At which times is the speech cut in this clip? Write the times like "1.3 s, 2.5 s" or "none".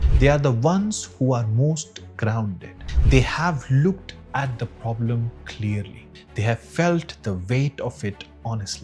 none